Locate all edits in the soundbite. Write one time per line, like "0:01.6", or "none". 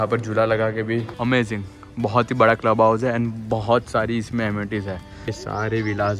0:01.1
0:05.3